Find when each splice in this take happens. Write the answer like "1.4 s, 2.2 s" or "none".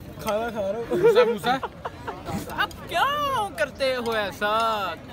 2.1 s